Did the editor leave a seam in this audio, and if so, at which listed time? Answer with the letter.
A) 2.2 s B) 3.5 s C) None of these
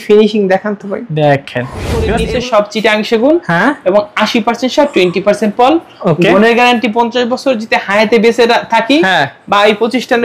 A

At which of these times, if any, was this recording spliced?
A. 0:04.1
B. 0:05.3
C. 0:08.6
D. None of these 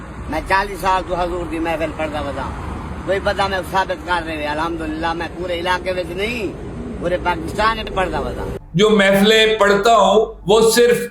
C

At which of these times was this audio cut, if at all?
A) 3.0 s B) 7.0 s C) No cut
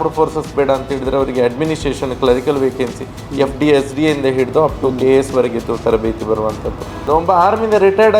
B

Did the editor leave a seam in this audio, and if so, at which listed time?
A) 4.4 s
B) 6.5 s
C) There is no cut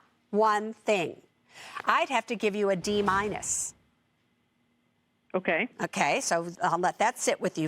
B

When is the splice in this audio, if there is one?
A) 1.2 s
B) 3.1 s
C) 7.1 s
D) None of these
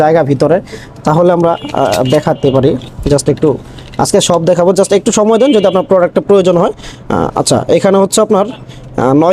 D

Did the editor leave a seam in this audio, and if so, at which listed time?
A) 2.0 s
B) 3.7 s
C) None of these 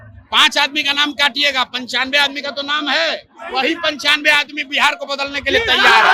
C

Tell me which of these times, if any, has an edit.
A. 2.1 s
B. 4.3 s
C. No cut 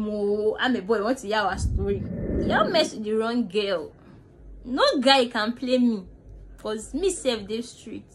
A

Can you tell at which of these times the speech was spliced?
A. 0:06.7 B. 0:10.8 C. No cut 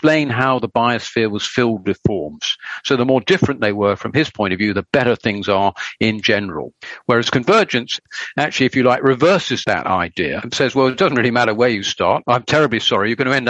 A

